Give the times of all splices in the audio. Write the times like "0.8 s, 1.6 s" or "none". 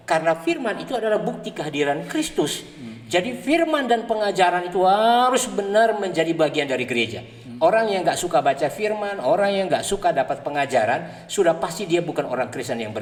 none